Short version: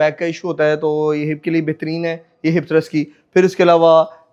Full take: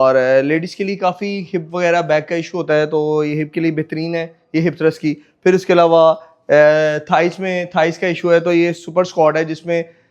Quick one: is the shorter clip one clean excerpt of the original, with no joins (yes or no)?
yes